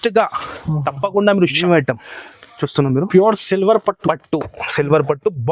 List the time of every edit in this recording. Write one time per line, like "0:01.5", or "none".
0:01.6